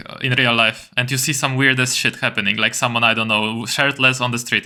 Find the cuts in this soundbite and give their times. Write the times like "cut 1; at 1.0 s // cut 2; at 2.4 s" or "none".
none